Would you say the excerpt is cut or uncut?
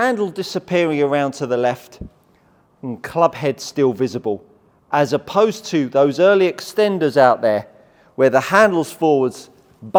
uncut